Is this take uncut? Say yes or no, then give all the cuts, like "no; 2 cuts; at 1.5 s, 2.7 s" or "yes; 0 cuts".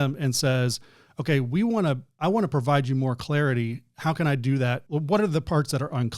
no; 1 cut; at 4.8 s